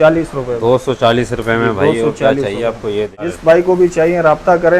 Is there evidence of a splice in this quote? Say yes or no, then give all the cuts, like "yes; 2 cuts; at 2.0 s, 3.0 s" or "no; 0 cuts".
yes; 1 cut; at 3.3 s